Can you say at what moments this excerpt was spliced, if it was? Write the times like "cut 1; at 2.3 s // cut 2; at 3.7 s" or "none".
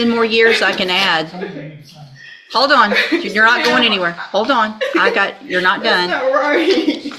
none